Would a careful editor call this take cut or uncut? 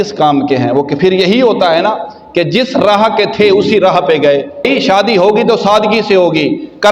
cut